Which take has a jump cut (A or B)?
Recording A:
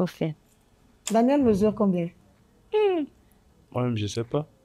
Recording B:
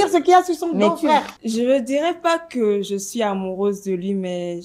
B